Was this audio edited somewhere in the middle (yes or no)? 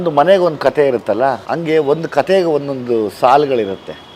yes